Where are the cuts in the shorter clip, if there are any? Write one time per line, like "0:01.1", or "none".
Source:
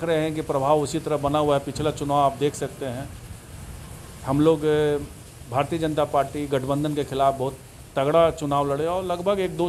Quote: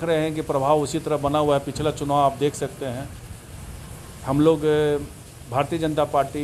none